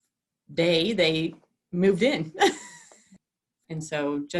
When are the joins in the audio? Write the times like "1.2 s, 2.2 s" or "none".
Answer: 3.1 s